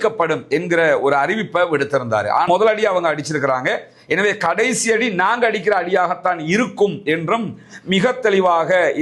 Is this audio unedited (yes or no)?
no